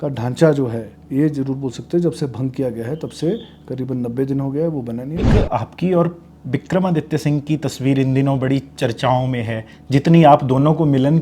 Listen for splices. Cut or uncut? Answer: cut